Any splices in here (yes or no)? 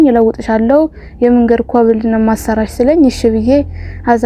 no